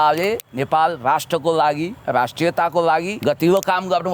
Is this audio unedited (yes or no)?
no